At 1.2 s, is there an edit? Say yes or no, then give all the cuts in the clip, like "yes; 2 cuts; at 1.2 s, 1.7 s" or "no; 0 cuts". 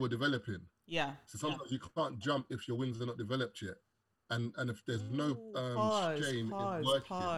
no; 0 cuts